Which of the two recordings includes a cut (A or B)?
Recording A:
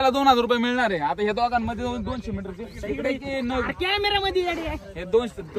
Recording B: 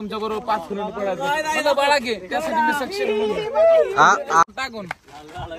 B